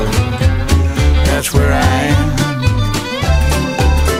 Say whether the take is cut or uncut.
uncut